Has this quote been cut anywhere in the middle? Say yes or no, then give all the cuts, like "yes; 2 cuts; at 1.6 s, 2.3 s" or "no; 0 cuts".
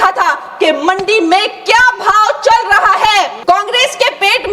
yes; 1 cut; at 3.4 s